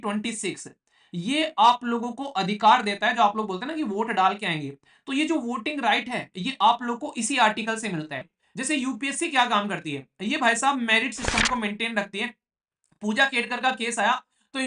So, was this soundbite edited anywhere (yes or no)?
yes